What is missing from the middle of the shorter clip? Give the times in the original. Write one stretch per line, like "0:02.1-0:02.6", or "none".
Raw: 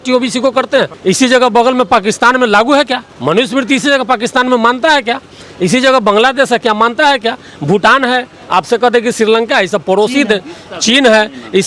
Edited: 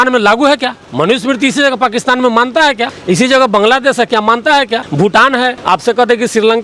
0:05.2-0:05.4
0:07.4-0:07.6
0:08.3-0:08.4